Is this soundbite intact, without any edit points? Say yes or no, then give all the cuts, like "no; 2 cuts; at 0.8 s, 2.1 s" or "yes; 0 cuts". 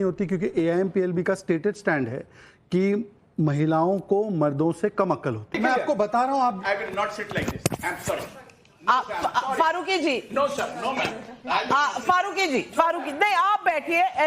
no; 1 cut; at 5.6 s